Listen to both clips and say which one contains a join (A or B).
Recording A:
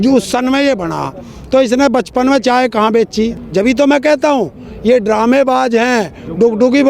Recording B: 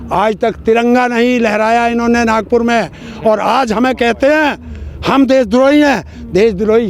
A